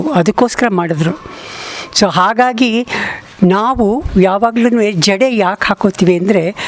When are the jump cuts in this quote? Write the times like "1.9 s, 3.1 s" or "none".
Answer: none